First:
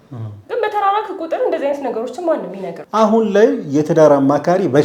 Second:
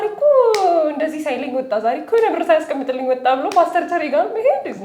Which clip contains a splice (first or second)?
first